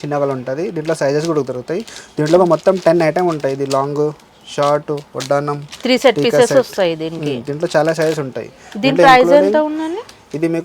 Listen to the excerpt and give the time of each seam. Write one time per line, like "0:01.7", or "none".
none

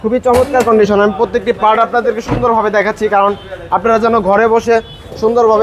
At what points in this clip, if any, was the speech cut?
none

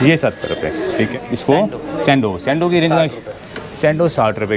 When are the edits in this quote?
0:01.1

